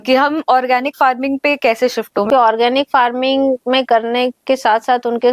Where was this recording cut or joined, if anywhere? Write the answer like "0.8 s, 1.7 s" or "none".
2.3 s